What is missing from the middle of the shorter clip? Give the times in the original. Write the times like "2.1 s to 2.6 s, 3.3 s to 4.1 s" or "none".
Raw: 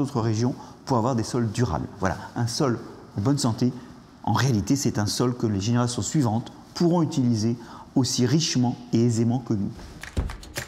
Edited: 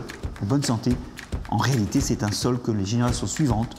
none

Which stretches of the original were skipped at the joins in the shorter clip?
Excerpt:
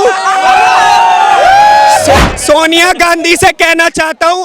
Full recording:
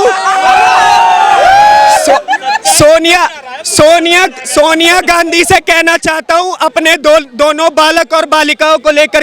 2.3 s to 4.4 s

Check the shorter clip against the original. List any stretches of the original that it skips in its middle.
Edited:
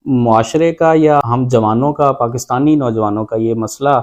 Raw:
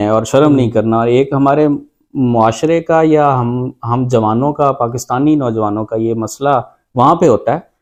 3.3 s to 3.8 s

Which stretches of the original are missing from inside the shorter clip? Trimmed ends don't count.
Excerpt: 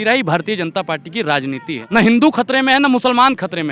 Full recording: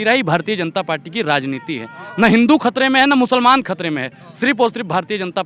1.8 s to 2.0 s

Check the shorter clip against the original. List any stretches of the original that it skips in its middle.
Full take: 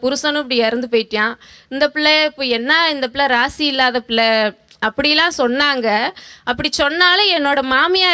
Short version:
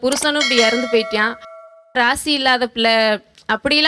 1.8 s to 3.1 s

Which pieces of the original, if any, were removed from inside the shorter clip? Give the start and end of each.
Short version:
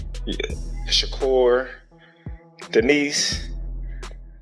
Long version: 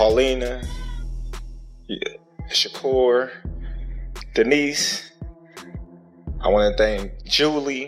none

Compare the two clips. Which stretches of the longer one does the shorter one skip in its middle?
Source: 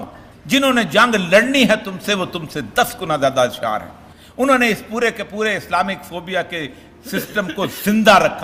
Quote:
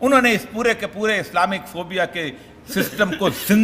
none

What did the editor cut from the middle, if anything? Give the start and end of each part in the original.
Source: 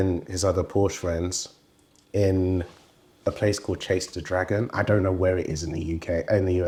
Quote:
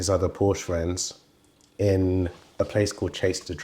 2.8 s to 3.1 s

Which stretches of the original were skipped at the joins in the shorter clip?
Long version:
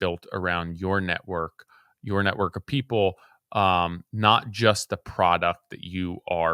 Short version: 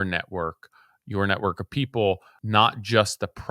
3.3 s to 4.0 s

